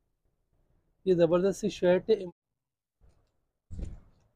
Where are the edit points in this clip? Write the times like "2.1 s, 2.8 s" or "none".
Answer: 2.2 s